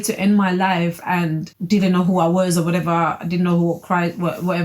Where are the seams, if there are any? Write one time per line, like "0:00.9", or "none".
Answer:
0:01.5